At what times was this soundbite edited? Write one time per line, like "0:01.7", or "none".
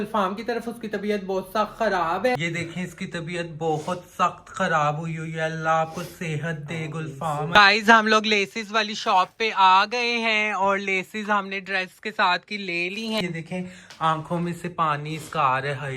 0:02.4
0:07.5
0:13.2